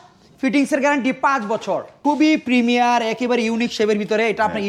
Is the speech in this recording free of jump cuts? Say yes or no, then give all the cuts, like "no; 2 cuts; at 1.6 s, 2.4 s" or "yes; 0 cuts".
no; 1 cut; at 2.0 s